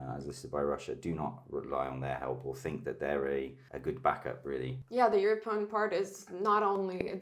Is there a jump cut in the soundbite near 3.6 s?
yes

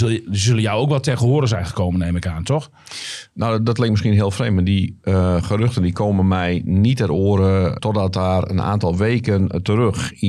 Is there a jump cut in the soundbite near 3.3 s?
no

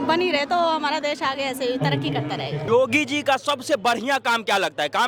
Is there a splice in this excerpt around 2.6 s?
yes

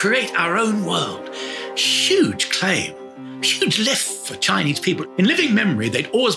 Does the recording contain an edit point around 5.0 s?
yes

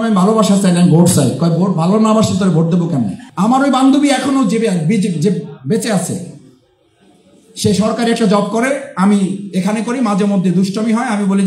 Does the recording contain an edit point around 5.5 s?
no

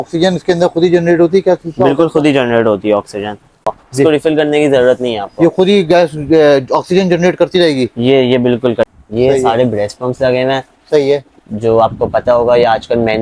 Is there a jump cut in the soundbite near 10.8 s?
no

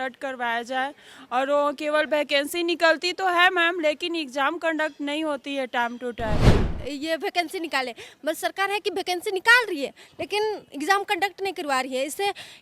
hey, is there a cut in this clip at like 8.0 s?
no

